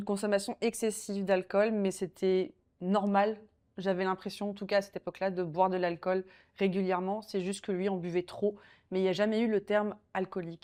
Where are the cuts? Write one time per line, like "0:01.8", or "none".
none